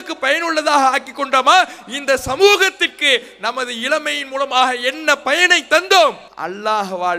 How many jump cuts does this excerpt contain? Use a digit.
1